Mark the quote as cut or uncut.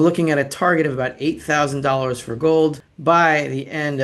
cut